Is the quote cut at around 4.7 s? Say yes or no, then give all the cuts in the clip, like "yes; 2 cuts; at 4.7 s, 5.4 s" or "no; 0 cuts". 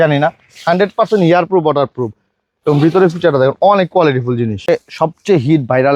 yes; 1 cut; at 4.7 s